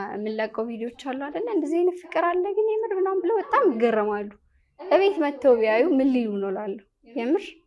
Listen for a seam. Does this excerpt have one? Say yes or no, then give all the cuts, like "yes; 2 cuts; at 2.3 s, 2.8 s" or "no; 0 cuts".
no; 0 cuts